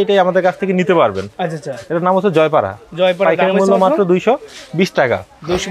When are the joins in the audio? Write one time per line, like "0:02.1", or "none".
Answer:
none